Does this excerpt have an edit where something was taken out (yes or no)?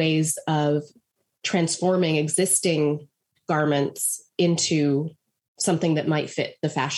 no